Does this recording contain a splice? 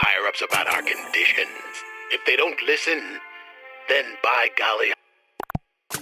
yes; 1 cut; at 4.9 s

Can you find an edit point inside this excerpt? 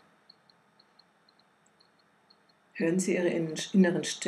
no; 0 cuts

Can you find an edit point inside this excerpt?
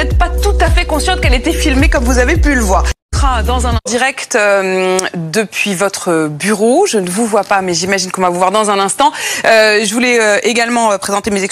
no; 0 cuts

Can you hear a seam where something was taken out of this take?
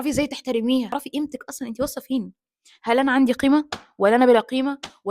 yes; 1 cut; at 0.9 s

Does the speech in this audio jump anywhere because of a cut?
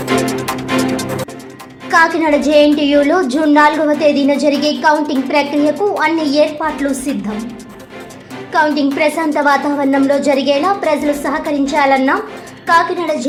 no; 0 cuts

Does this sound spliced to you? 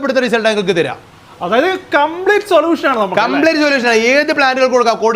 no; 0 cuts

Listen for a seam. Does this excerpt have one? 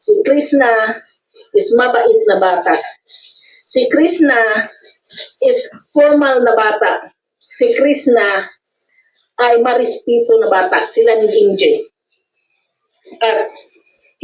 no; 0 cuts

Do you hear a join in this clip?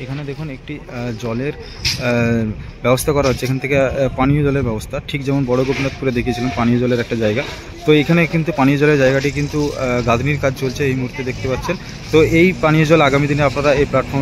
no; 0 cuts

